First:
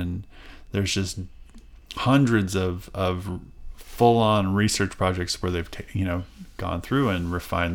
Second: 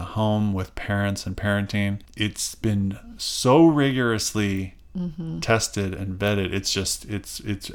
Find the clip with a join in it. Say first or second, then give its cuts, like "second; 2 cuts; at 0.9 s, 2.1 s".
second; 1 cut; at 2.1 s